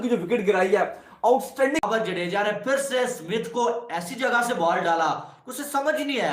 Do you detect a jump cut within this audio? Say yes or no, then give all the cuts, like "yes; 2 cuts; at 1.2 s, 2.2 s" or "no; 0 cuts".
yes; 1 cut; at 1.8 s